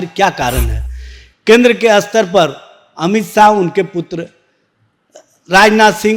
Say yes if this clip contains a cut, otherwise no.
yes